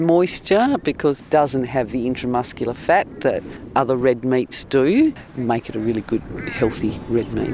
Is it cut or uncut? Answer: cut